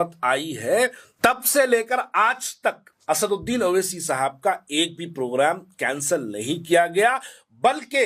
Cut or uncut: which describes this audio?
cut